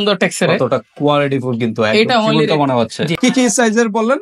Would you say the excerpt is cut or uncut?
cut